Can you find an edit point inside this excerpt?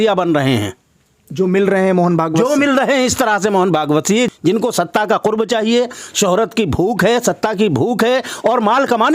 yes; 1 cut; at 4.3 s

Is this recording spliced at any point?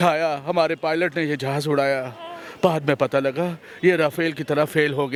no; 0 cuts

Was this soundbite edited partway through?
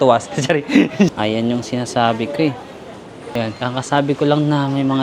yes; 2 cuts; at 1.1 s, 3.1 s

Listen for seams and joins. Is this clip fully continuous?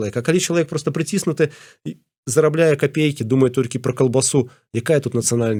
yes; 0 cuts

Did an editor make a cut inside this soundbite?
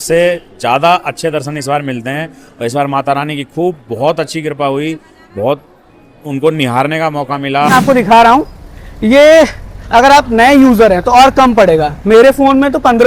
yes; 1 cut; at 7.7 s

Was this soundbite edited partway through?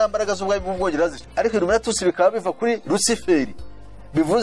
yes; 1 cut; at 1.2 s

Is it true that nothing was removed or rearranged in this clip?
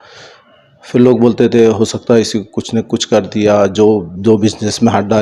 yes; 0 cuts

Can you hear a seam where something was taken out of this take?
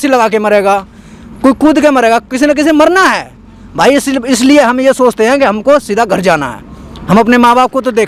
no; 0 cuts

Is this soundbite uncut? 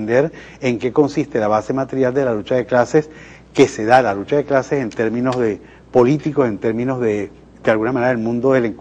no; 1 cut; at 6.4 s

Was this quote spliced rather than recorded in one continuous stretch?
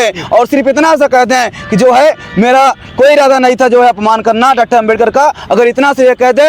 no; 0 cuts

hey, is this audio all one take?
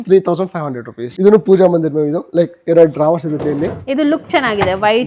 no; 1 cut; at 1.1 s

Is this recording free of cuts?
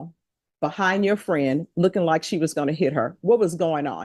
yes; 0 cuts

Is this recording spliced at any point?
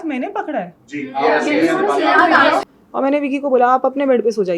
yes; 1 cut; at 2.7 s

